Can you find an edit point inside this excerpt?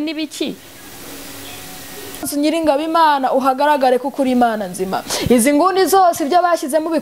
yes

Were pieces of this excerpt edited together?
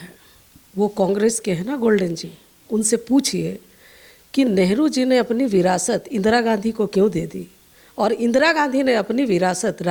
no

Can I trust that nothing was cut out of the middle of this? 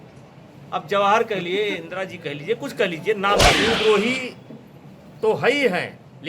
no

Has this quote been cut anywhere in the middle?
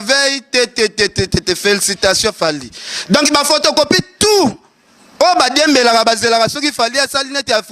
no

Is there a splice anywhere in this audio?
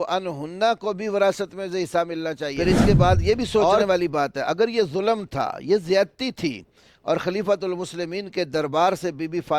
yes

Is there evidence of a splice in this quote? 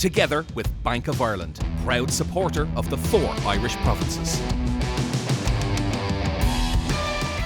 no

